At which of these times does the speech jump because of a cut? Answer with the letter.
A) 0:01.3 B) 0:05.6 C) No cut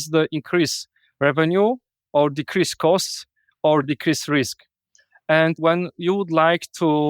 B